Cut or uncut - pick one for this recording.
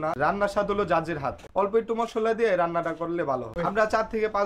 uncut